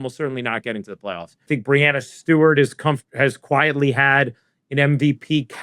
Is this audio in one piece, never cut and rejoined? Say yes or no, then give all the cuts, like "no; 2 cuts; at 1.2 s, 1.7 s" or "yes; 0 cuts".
no; 1 cut; at 1.5 s